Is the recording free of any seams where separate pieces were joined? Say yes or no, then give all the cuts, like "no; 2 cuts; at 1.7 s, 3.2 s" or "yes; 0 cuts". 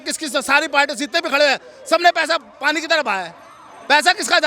yes; 0 cuts